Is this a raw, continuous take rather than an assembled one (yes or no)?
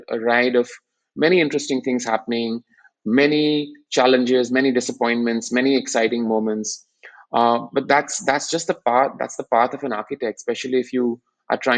yes